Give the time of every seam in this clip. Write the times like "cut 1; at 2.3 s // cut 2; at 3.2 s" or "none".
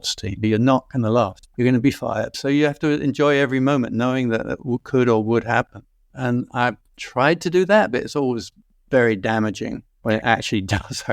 none

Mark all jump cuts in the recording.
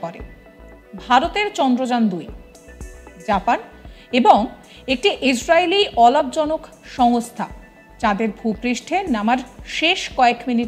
none

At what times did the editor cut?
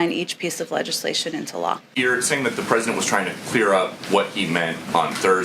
cut 1; at 1.9 s

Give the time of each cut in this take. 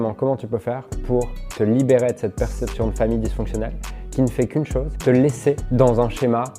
cut 1; at 4.9 s // cut 2; at 5.6 s

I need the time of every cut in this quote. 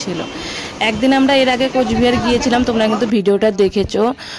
none

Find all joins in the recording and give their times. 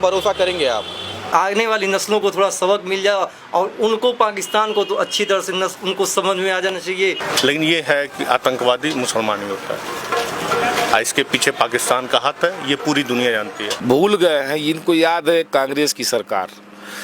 cut 1; at 1.1 s // cut 2; at 7.2 s // cut 3; at 13.7 s

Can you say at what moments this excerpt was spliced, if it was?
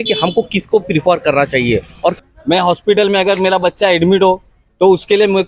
cut 1; at 2.2 s

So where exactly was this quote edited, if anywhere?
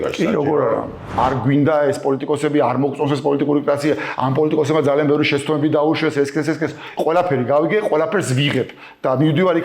cut 1; at 1.2 s

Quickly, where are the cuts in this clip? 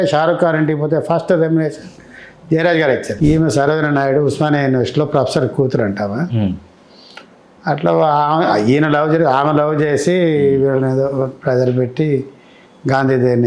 cut 1; at 3.1 s

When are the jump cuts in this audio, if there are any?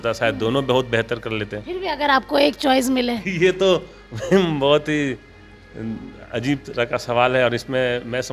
none

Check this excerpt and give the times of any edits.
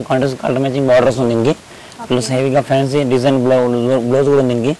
none

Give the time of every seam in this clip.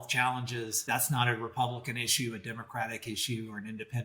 none

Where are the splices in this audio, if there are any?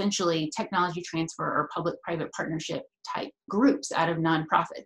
cut 1; at 3.5 s

